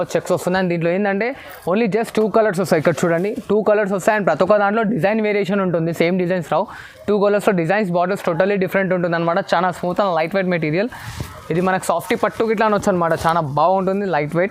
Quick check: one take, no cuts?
yes; 0 cuts

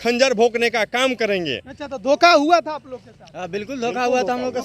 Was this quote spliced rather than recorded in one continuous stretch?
no; 0 cuts

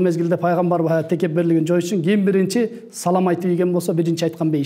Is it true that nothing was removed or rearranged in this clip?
yes; 0 cuts

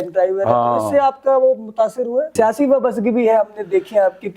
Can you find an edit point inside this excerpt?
yes; 1 cut; at 2.3 s

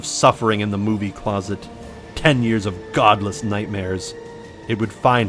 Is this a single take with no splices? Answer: yes; 0 cuts

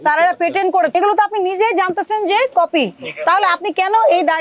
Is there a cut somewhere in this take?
yes; 1 cut; at 0.9 s

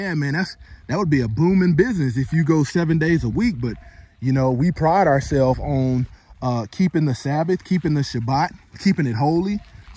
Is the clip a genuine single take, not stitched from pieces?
yes; 0 cuts

